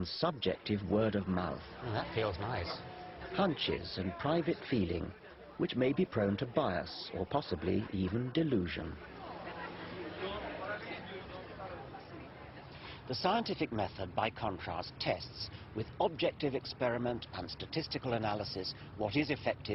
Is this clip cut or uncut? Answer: cut